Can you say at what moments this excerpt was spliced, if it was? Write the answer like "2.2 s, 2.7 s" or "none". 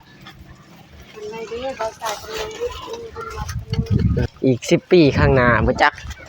4.2 s